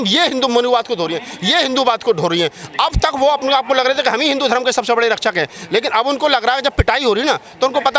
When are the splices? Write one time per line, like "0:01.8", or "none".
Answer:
none